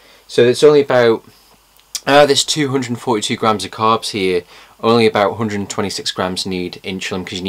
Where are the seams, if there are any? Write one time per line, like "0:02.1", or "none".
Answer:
0:01.8

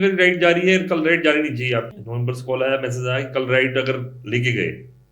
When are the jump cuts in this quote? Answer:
0:02.0

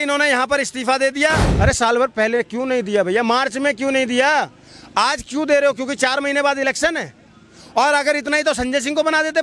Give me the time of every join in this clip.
0:01.5

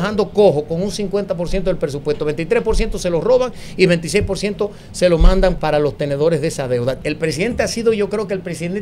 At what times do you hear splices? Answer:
0:05.6
0:07.0

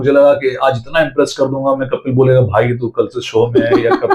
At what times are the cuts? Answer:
none

